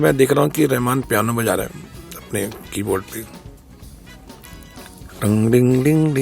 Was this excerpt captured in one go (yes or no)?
yes